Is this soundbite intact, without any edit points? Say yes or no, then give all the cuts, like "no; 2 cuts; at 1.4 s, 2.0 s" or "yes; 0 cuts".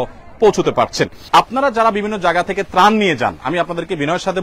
no; 1 cut; at 1.2 s